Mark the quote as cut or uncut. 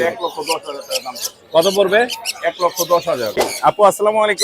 cut